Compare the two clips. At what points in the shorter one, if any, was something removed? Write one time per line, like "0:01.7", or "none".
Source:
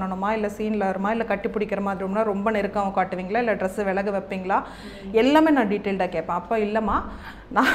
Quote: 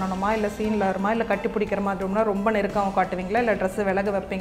none